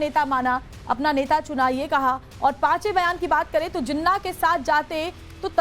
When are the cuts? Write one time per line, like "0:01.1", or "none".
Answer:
0:02.3

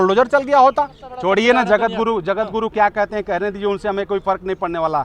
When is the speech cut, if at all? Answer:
0:01.0

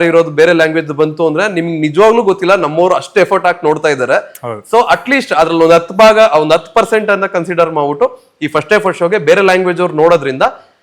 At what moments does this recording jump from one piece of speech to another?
none

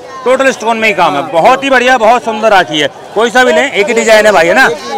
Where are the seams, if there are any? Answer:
none

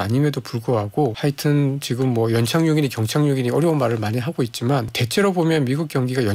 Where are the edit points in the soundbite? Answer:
0:01.2
0:05.0

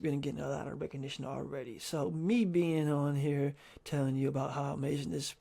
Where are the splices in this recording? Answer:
none

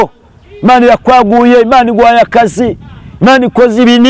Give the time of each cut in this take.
none

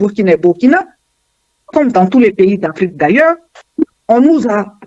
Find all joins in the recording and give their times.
none

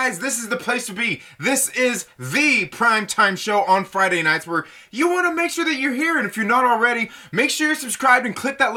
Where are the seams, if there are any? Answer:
none

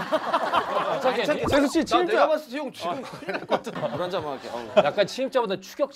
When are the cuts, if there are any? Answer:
0:00.9
0:03.7

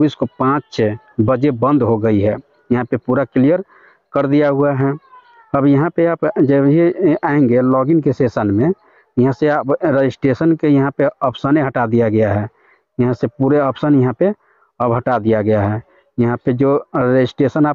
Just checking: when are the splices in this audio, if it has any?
none

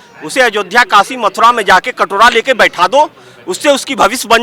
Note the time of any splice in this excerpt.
none

